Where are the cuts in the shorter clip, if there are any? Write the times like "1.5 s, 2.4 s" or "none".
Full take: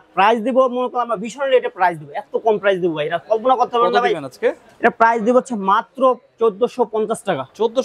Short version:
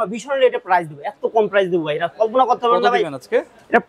none